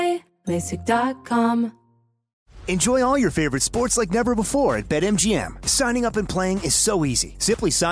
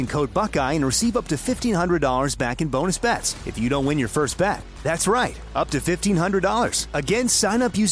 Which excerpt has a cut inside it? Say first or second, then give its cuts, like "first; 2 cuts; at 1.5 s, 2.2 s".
first; 1 cut; at 1.8 s